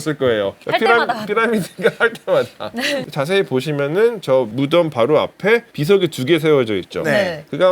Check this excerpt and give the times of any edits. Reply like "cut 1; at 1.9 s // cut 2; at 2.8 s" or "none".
cut 1; at 3.1 s